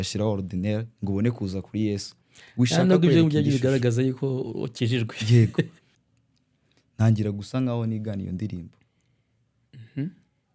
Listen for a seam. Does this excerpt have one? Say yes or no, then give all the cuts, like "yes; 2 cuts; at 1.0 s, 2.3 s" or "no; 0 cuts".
yes; 1 cut; at 5.8 s